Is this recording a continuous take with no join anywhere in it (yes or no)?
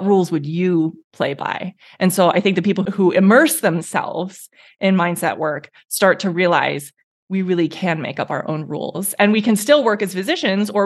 no